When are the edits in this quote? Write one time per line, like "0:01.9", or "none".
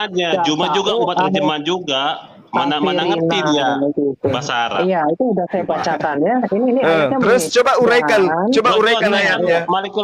none